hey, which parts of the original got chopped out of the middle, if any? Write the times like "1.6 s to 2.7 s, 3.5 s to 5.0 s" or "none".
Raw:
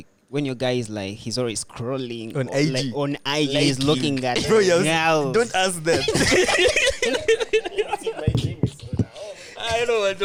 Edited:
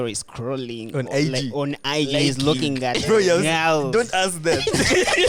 none